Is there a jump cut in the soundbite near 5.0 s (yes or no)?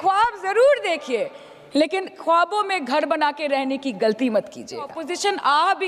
yes